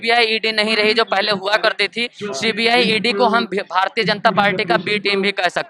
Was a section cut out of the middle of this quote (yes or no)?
no